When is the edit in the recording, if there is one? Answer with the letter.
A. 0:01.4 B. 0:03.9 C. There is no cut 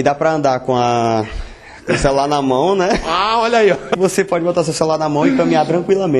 B